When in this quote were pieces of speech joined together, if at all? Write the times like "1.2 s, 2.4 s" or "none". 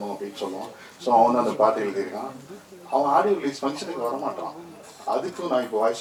none